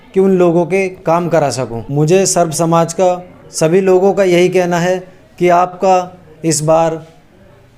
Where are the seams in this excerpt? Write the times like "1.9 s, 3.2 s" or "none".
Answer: 1.8 s, 3.4 s